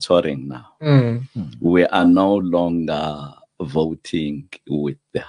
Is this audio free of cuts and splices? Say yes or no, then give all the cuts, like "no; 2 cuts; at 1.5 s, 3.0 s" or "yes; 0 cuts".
yes; 0 cuts